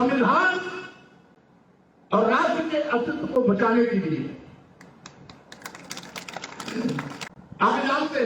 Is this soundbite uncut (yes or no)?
no